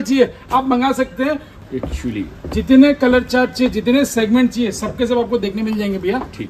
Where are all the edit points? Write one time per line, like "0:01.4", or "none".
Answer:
0:01.5